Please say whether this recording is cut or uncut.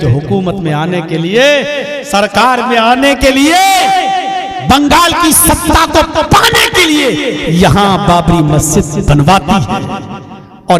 uncut